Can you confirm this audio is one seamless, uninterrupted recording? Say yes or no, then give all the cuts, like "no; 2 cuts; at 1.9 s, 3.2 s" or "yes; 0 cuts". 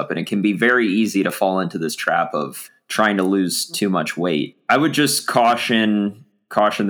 no; 1 cut; at 4.6 s